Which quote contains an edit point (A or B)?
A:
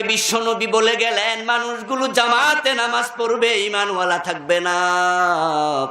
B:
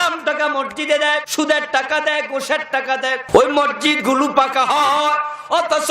B